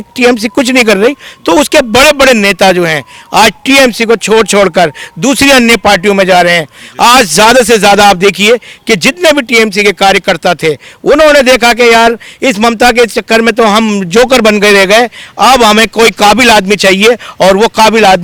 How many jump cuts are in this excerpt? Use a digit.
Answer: 0